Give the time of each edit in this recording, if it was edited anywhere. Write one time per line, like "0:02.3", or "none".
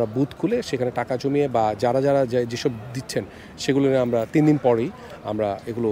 none